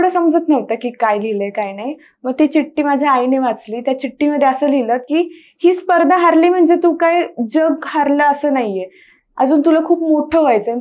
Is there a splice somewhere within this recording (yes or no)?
no